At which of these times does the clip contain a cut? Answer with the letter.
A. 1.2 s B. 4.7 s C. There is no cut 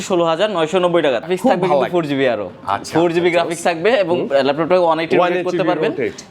A